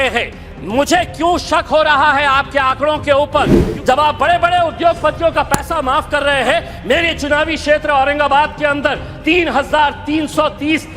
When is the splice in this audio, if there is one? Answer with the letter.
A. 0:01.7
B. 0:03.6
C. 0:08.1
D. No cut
B